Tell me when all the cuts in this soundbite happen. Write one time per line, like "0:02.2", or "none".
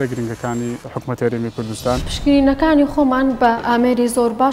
0:00.8
0:02.1
0:03.6